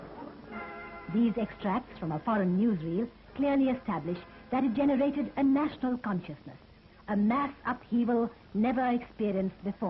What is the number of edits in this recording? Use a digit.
1